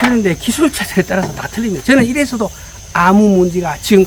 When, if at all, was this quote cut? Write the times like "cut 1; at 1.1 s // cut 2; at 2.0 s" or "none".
none